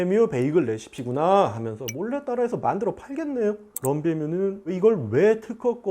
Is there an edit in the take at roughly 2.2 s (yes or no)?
no